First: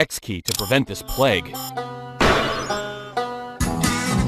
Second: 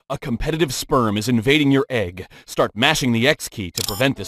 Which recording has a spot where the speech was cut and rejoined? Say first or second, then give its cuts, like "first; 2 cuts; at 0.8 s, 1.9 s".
first; 2 cuts; at 2.0 s, 2.6 s